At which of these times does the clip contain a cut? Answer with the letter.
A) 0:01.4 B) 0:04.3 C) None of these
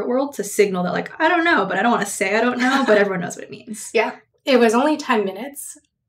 B